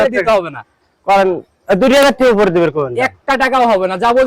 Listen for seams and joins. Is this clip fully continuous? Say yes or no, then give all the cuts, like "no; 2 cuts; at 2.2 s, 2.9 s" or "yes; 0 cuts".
yes; 0 cuts